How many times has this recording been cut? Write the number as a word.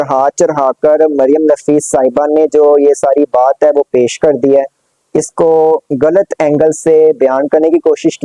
zero